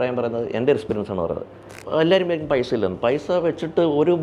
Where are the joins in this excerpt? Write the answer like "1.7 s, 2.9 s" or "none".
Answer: 1.7 s